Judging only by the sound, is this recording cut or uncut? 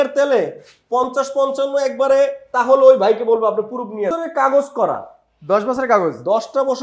cut